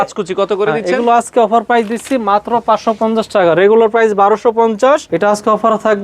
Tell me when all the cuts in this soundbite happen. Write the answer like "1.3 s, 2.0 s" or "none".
5.1 s